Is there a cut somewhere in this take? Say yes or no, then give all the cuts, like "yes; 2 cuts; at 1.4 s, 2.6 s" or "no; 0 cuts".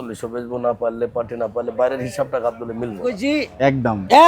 yes; 1 cut; at 3.2 s